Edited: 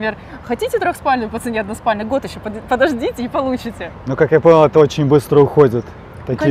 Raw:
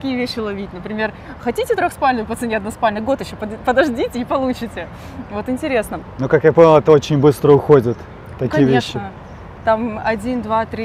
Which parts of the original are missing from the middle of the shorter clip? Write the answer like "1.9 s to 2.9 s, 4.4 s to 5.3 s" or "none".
4.9 s to 6.1 s